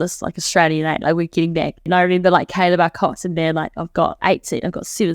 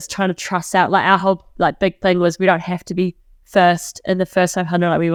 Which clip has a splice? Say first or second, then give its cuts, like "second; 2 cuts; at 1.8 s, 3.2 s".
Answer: first; 2 cuts; at 1.8 s, 4.2 s